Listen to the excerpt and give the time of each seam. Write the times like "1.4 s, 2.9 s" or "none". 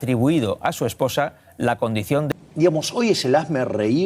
2.3 s